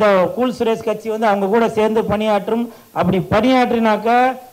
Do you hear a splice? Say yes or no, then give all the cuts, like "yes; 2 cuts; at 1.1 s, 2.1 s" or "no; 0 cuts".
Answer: no; 0 cuts